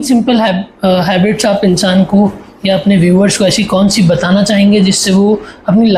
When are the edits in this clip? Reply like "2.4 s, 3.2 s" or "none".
none